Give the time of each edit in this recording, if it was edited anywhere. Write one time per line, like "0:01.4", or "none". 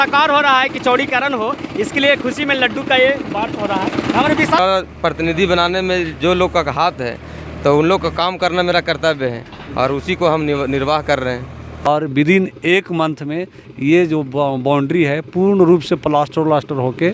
0:04.6
0:11.8